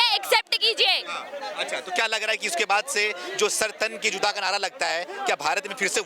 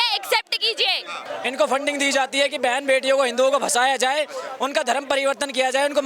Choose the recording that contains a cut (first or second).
second